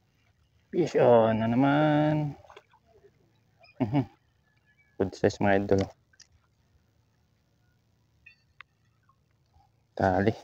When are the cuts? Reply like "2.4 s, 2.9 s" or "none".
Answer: none